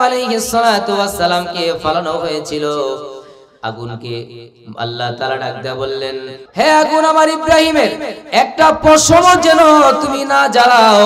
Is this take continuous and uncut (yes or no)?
no